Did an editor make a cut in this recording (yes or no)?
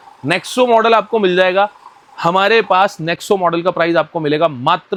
no